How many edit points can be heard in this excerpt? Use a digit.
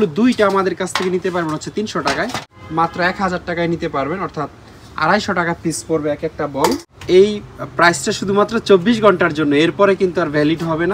2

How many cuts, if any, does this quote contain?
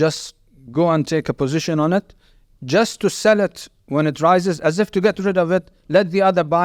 0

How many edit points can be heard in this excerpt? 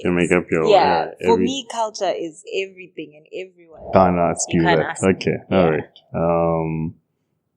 1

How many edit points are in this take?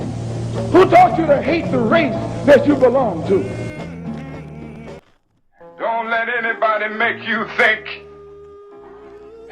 1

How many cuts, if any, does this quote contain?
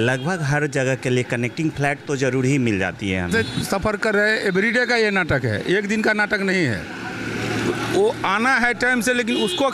1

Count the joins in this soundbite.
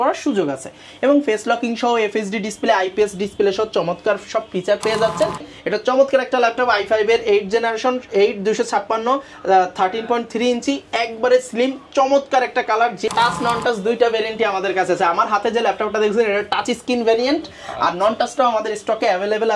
2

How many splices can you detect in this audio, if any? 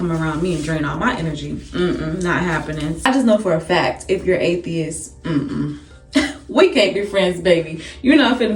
1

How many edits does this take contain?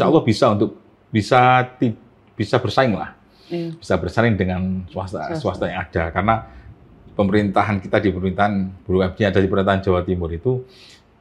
0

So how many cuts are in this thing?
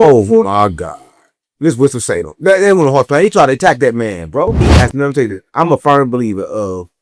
1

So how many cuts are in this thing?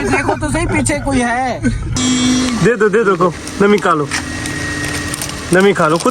1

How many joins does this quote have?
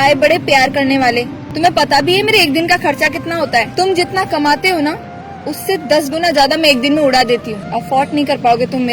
1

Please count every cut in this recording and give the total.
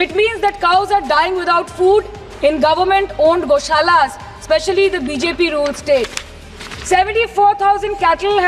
0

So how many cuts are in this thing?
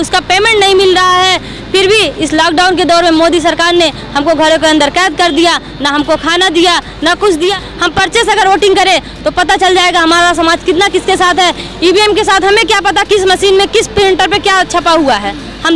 1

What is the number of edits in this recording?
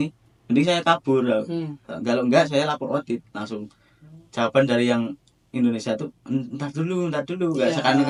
0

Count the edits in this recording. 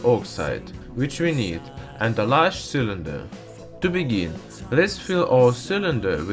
0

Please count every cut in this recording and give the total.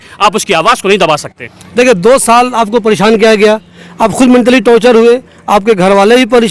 0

